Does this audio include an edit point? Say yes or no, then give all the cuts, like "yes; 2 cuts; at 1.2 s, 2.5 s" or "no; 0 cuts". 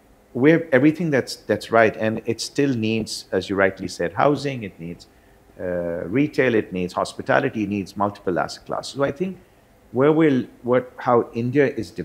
no; 0 cuts